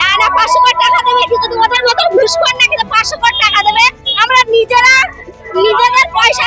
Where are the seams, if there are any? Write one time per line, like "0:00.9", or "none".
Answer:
none